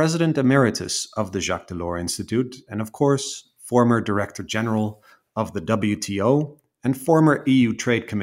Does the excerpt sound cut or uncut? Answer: uncut